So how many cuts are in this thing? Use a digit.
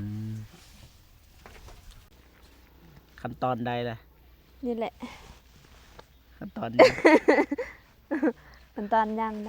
1